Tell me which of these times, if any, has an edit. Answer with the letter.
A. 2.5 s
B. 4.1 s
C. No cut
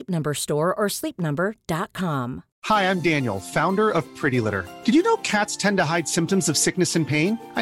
A